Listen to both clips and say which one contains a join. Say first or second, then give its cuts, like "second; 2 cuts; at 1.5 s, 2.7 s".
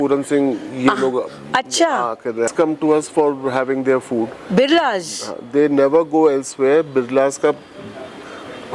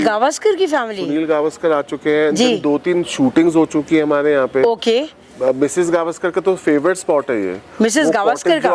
first; 1 cut; at 2.5 s